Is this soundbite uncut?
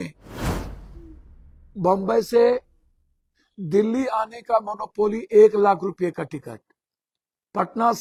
yes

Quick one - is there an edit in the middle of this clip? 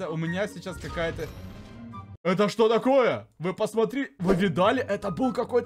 no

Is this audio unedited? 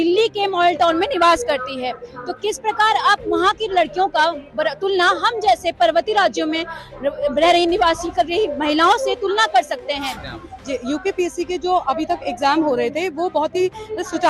no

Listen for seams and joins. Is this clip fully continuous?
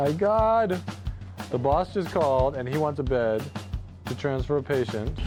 yes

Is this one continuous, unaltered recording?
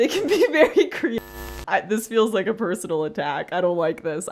no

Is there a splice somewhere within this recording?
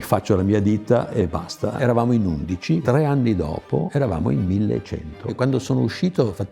yes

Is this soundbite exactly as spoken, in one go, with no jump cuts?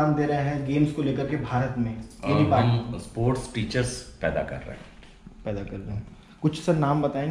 yes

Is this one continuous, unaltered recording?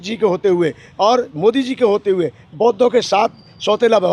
yes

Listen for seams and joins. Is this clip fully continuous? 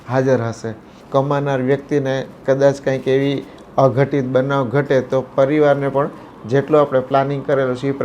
no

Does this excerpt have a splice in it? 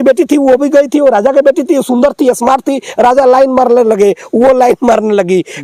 no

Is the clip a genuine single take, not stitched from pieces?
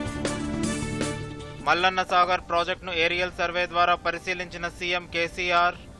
no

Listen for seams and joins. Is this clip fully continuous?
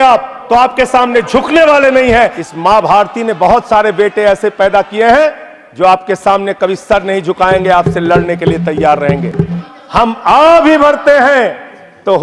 no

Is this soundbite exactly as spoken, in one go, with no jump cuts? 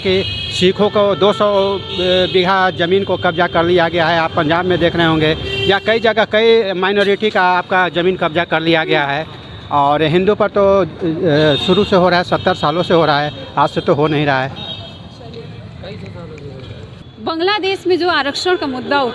yes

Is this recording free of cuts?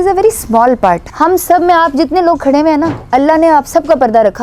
no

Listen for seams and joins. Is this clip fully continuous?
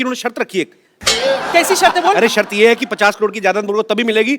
no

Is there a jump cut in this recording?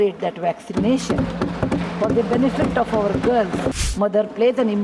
yes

